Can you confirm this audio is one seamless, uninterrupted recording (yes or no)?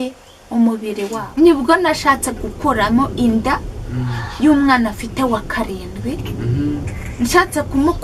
no